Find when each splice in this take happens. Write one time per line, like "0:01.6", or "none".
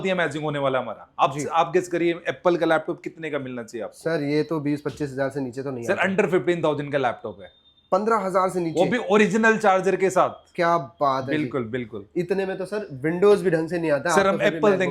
none